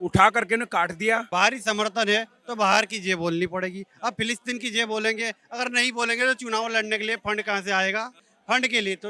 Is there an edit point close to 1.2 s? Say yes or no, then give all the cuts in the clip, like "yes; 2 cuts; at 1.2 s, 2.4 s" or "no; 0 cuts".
yes; 1 cut; at 1.2 s